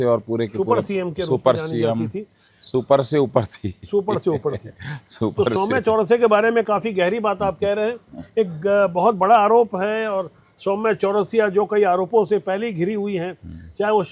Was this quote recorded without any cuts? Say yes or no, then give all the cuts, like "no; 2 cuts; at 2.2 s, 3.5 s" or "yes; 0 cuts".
yes; 0 cuts